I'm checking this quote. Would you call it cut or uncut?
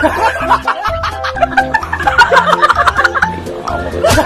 uncut